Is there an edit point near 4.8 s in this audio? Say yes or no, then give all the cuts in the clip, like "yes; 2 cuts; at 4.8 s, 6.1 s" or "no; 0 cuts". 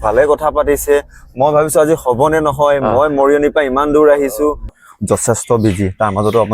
yes; 1 cut; at 4.8 s